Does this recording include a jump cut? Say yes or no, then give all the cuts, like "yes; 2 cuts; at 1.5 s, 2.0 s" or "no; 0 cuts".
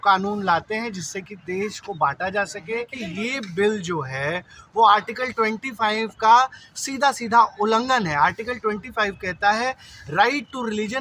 yes; 1 cut; at 2.9 s